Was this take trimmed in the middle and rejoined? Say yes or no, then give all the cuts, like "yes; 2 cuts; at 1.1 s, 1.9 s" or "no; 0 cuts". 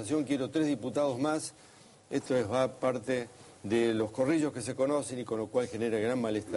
yes; 1 cut; at 4.1 s